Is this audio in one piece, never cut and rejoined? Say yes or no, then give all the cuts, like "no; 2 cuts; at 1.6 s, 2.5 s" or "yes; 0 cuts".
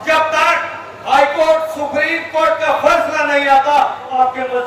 yes; 0 cuts